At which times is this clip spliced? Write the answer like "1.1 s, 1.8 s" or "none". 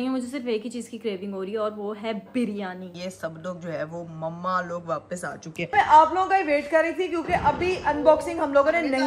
2.9 s, 5.7 s